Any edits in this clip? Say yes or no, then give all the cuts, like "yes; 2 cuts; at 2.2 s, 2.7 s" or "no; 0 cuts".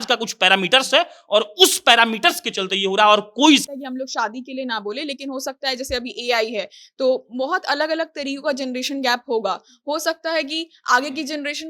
yes; 1 cut; at 3.6 s